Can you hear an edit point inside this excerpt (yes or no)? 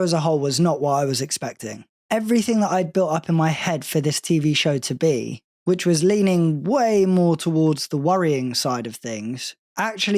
no